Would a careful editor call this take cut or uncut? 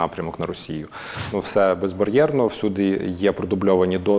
cut